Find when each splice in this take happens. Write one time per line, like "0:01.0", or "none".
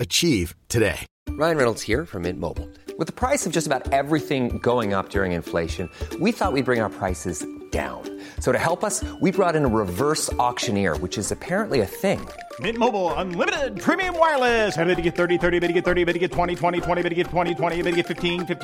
0:01.1